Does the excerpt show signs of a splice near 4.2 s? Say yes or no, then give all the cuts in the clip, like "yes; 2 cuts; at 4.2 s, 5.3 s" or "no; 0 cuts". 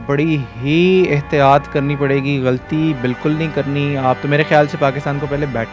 yes; 1 cut; at 4.2 s